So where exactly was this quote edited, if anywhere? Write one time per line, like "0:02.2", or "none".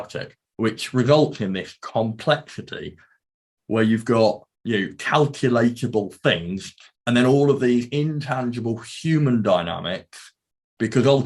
0:03.2
0:04.5
0:06.8